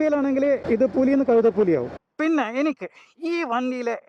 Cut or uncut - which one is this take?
cut